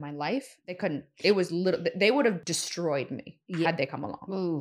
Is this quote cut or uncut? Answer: cut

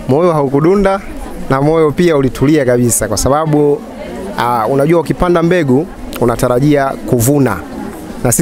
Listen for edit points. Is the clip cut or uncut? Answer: uncut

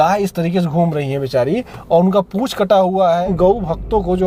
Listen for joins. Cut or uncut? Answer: cut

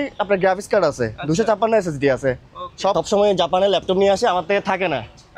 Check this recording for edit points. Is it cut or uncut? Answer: cut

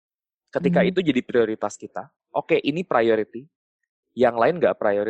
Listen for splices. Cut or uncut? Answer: cut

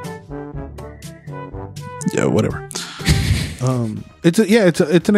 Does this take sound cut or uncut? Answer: uncut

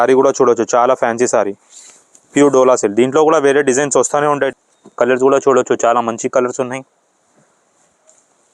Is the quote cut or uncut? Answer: cut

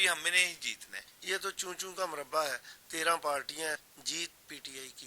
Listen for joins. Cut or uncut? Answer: cut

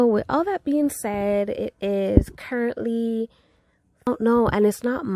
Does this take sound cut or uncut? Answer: cut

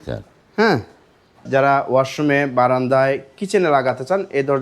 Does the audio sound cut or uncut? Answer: cut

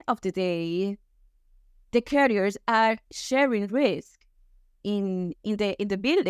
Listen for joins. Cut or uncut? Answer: uncut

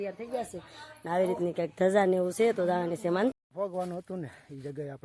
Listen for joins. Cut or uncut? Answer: cut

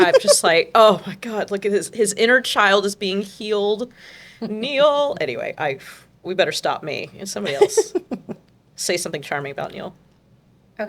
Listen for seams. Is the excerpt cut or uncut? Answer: uncut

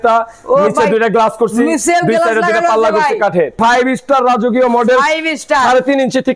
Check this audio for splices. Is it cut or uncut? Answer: cut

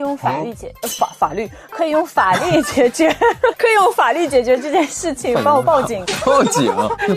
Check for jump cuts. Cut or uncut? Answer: uncut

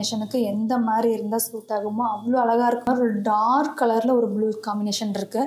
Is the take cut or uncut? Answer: cut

